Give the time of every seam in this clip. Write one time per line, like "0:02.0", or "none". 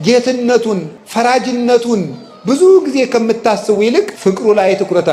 0:01.0
0:04.1